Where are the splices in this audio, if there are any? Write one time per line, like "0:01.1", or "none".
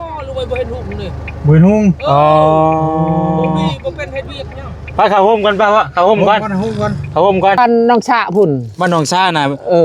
0:07.6